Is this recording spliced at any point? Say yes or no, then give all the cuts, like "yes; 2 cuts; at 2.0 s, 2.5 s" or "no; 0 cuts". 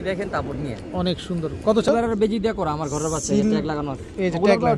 yes; 1 cut; at 1.9 s